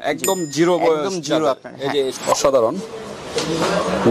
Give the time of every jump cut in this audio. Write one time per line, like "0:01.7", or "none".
0:02.2